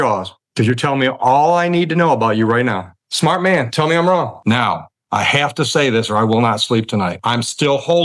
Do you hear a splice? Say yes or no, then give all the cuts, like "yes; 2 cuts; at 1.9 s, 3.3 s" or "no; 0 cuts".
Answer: yes; 3 cuts; at 3.1 s, 4.4 s, 7.1 s